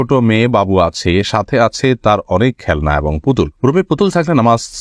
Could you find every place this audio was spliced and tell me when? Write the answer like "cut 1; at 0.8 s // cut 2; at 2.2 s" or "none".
none